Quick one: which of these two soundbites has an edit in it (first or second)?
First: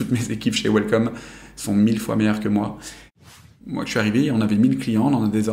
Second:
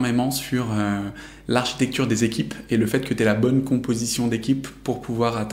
first